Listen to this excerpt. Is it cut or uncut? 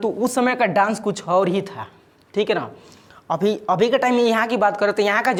uncut